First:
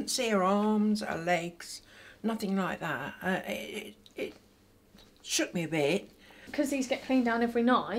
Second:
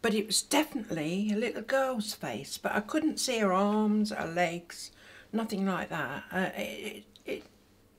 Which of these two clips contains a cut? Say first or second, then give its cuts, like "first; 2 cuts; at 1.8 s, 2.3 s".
first; 1 cut; at 6.4 s